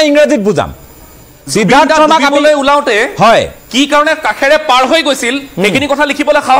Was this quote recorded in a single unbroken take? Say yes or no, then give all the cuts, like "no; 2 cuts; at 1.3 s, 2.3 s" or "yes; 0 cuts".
yes; 0 cuts